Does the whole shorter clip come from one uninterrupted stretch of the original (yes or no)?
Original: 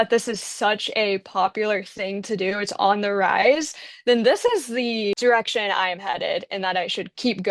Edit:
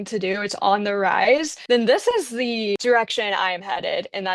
no